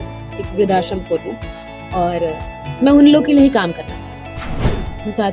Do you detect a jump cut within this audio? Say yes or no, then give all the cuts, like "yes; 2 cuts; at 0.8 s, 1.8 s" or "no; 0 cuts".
no; 0 cuts